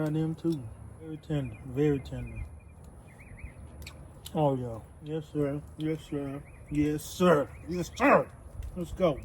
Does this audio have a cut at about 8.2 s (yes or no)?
no